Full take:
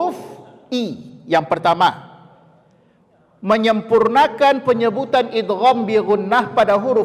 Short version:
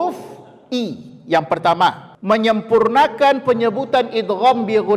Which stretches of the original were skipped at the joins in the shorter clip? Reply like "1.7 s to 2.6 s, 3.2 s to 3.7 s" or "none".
2.1 s to 3.3 s